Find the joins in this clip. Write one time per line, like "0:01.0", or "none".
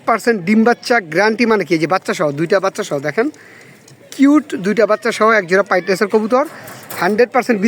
none